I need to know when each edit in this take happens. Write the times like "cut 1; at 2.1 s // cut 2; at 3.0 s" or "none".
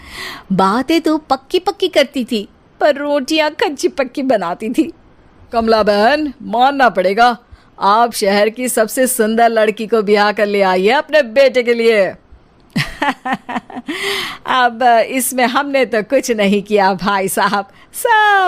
cut 1; at 5.6 s